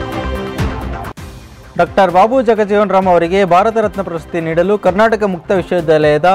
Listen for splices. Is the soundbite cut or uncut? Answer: cut